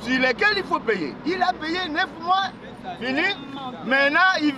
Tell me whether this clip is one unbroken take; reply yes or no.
yes